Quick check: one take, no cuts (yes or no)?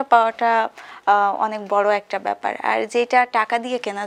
yes